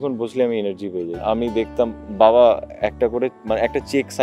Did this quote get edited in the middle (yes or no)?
yes